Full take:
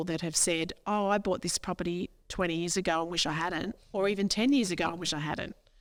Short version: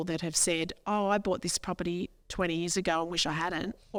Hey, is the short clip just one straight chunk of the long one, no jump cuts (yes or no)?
yes